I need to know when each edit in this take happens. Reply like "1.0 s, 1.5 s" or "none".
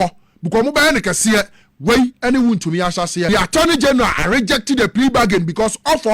3.3 s

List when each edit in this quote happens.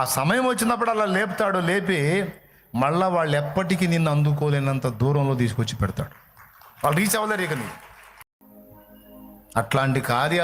8.3 s

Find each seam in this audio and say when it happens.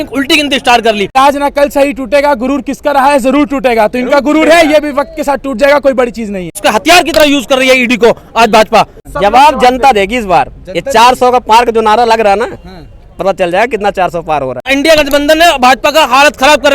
1.2 s, 6.5 s, 9.0 s, 14.7 s

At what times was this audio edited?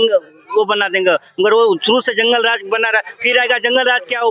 none

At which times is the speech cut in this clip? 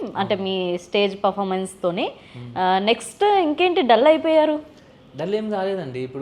none

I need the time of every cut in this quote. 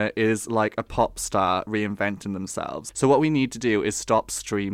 2.8 s

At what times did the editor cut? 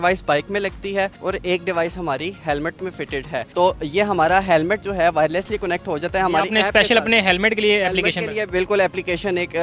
none

